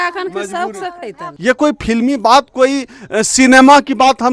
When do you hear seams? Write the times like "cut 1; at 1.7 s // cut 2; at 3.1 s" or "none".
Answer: cut 1; at 1.2 s